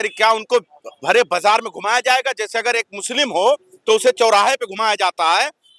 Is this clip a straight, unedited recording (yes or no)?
yes